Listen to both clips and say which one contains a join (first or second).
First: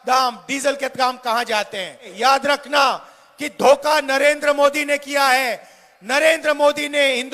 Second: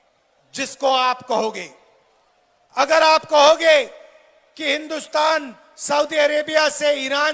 first